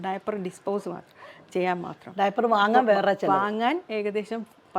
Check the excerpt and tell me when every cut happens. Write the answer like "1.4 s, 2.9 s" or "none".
none